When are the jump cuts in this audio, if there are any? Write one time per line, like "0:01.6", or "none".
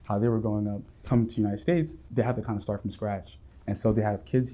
0:01.0
0:02.0